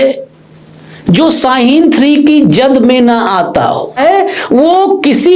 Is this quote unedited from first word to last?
no; 1 cut; at 4.0 s

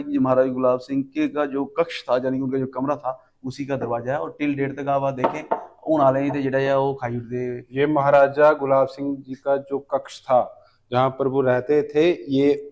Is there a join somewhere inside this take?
no; 0 cuts

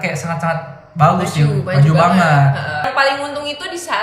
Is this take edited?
yes; 1 cut; at 2.9 s

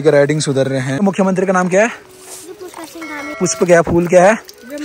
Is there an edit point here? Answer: yes; 2 cuts; at 1.0 s, 3.4 s

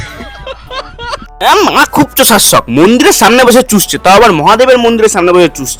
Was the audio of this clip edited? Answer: no; 0 cuts

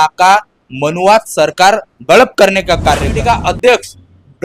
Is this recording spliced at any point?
yes; 1 cut; at 3.1 s

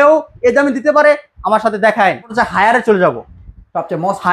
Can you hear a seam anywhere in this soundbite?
yes; 1 cut; at 2.3 s

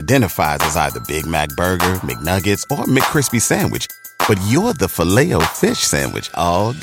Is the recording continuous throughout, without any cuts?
yes; 0 cuts

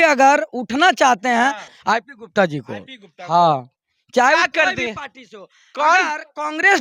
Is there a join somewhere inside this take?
yes; 1 cut; at 1.7 s

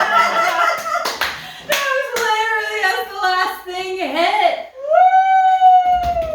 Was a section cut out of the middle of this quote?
no; 0 cuts

